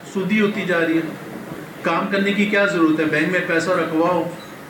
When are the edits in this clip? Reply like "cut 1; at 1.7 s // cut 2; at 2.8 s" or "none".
none